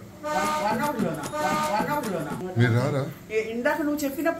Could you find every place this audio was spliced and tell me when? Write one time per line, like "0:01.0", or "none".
0:02.4